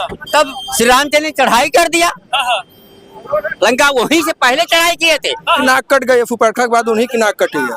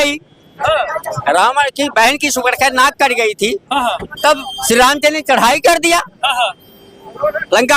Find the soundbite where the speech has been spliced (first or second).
first